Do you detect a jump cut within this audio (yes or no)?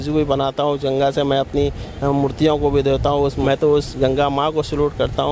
yes